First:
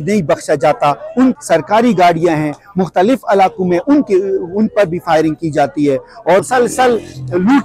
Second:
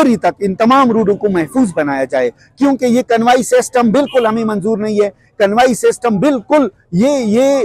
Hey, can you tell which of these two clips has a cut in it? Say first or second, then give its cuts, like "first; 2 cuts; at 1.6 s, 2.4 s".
first; 2 cuts; at 1.4 s, 6.4 s